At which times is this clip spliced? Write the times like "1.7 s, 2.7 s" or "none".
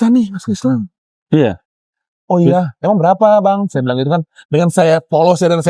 none